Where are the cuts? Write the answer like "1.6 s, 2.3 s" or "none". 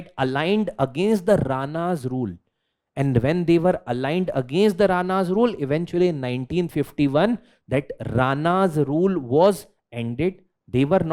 none